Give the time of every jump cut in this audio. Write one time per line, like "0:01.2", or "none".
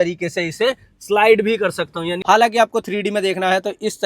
0:02.1